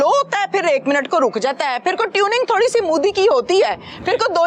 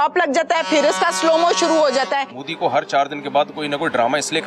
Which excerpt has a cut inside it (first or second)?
second